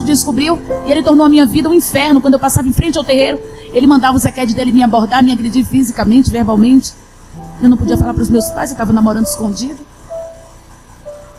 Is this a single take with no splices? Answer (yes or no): yes